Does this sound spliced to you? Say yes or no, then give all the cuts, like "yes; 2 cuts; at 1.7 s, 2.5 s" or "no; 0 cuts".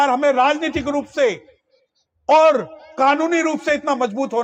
no; 0 cuts